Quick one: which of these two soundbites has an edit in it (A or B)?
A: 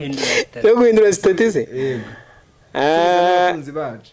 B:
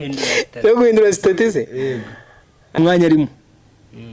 B